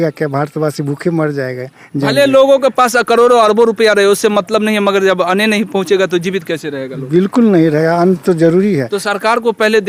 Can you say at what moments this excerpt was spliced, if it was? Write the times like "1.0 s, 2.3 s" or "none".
none